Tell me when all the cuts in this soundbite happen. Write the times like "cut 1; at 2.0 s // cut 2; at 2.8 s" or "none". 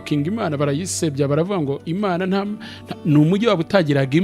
none